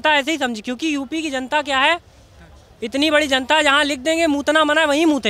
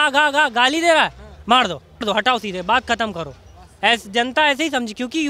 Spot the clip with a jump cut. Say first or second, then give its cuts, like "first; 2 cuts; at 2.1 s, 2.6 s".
second; 1 cut; at 1.9 s